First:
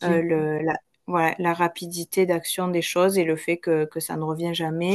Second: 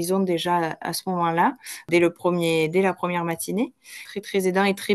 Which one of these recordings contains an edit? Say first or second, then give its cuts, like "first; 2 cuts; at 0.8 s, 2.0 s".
second; 2 cuts; at 1.9 s, 4.0 s